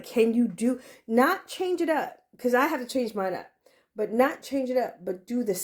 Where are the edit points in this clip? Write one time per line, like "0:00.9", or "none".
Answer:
none